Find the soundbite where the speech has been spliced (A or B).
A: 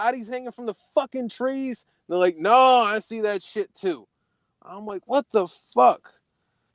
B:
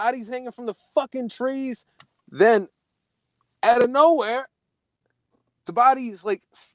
B